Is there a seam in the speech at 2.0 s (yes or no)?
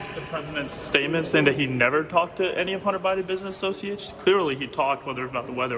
no